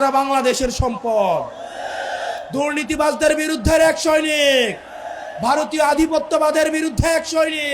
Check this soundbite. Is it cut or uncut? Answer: cut